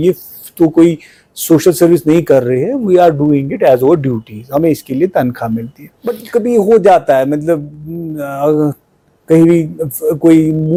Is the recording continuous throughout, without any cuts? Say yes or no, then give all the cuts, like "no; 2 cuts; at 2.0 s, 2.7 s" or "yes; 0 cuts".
yes; 0 cuts